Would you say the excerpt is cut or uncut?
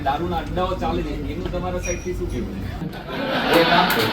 cut